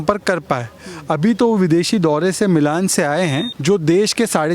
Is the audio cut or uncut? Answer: cut